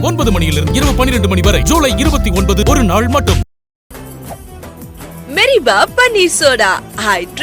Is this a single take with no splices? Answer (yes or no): yes